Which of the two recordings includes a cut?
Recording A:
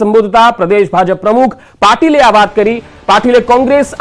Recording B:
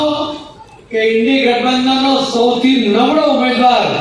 A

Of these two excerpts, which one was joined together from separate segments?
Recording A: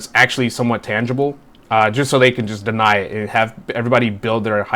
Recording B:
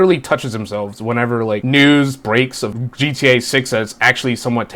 B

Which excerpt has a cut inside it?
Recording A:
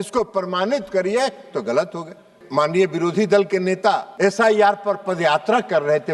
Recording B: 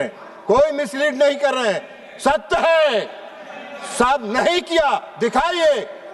A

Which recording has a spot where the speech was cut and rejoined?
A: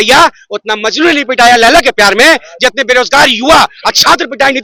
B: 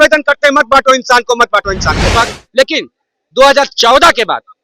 B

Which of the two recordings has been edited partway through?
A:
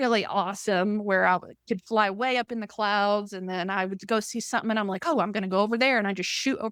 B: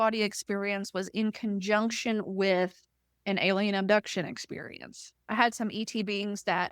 B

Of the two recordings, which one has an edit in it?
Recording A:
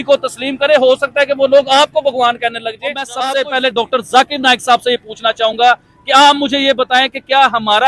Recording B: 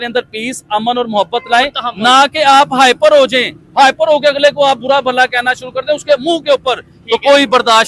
A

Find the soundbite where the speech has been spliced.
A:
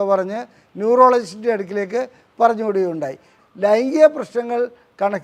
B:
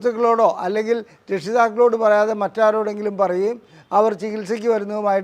A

